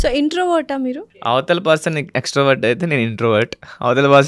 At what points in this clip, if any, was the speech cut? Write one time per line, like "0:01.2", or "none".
0:01.1